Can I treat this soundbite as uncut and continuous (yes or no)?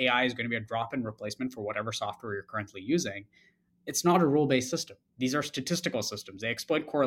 yes